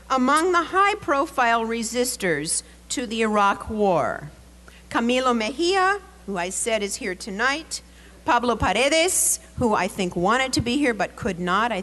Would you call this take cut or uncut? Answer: uncut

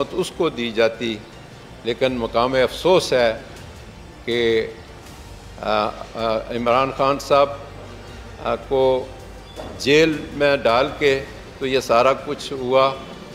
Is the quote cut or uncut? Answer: uncut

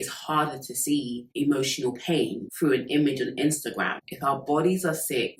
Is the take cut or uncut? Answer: cut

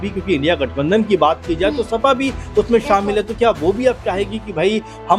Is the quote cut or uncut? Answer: uncut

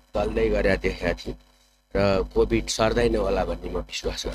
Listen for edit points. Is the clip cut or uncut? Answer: uncut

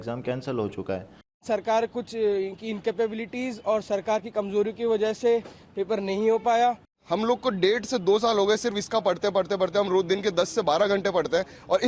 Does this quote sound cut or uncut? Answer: cut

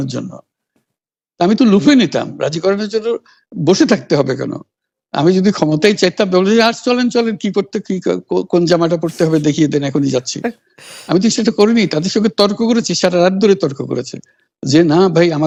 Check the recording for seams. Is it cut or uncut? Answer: uncut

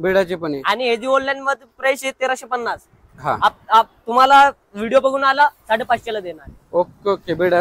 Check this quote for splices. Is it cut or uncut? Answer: uncut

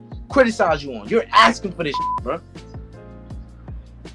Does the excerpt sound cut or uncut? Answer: cut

